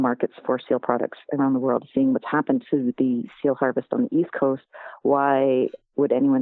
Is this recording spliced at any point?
no; 0 cuts

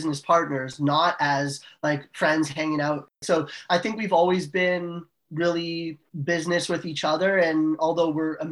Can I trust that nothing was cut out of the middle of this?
no; 2 cuts; at 3.6 s, 6.1 s

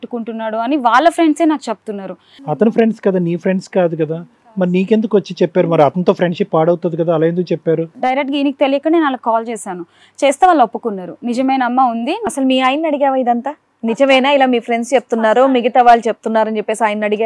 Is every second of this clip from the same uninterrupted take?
no; 2 cuts; at 2.6 s, 7.9 s

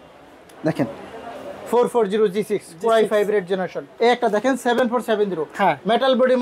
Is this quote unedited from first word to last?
no; 1 cut; at 3.8 s

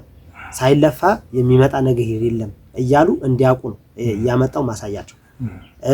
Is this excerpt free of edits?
yes; 0 cuts

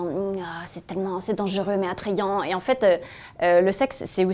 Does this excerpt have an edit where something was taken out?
no; 0 cuts

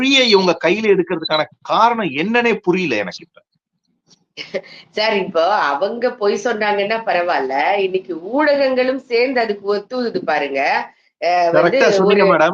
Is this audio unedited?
yes; 0 cuts

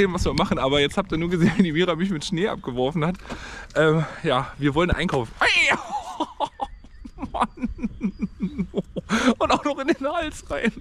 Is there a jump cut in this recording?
no; 0 cuts

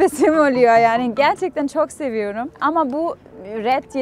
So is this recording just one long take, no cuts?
no; 1 cut; at 2.6 s

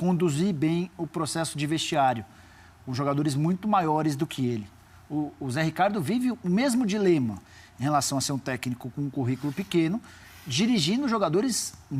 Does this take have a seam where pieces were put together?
no; 0 cuts

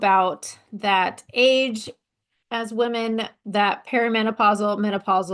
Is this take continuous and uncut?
yes; 0 cuts

